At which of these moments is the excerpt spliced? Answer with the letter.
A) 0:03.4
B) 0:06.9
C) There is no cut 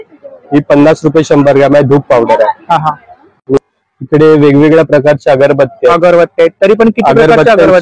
A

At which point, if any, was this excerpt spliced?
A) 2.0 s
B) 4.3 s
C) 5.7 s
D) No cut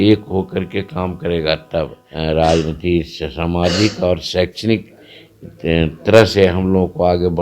A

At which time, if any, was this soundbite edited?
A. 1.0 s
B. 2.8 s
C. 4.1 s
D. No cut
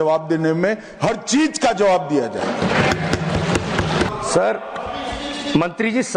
C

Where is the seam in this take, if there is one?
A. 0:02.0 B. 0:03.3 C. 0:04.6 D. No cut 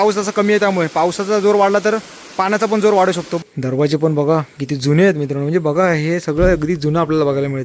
B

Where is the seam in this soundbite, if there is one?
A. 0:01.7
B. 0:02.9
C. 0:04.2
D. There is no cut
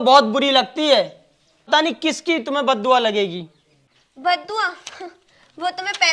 A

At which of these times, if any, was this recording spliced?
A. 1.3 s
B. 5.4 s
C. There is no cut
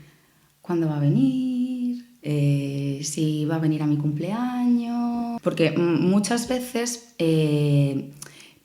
B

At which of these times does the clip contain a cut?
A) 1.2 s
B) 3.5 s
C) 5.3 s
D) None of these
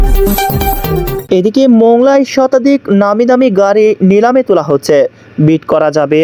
A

